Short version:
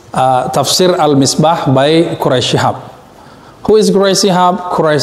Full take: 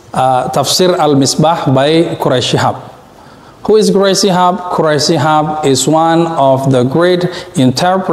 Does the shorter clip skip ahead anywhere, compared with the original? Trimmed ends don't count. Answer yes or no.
no